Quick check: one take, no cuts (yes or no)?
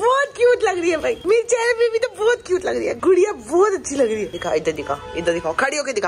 yes